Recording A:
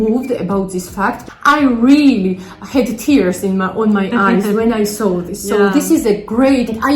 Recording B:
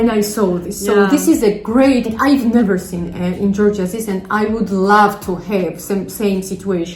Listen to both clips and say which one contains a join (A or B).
A